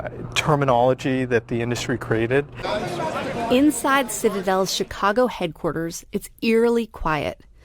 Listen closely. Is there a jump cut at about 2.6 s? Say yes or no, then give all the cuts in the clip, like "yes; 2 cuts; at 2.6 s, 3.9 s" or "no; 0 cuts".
yes; 1 cut; at 2.6 s